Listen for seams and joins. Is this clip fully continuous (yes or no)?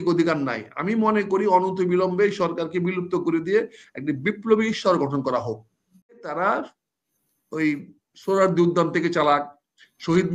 no